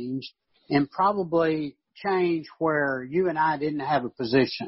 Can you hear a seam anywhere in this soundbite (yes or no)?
no